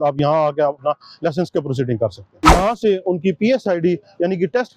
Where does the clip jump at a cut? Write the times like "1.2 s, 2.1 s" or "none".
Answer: 2.2 s

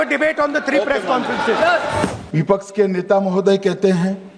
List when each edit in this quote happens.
2.2 s

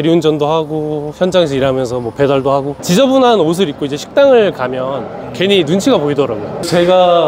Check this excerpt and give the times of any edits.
2.8 s

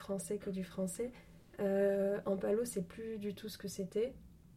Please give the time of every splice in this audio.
none

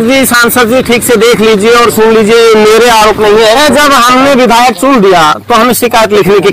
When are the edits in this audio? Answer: 3.6 s

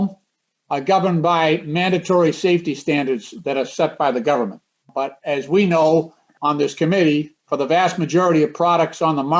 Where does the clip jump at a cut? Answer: 5.2 s, 6.3 s

